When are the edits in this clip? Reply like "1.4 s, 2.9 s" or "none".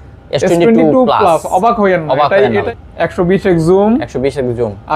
2.7 s